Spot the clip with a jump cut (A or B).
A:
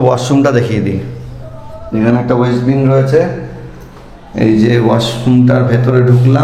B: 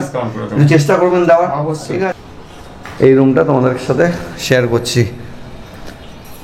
B